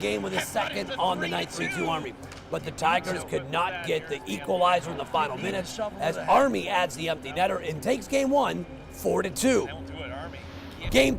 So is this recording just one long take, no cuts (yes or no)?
no